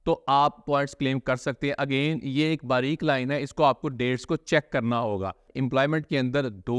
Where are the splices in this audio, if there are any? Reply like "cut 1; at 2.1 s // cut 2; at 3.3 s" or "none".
cut 1; at 5.5 s